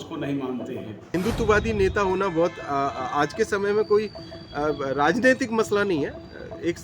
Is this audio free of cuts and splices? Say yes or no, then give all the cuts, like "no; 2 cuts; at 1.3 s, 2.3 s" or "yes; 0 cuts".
no; 1 cut; at 1.1 s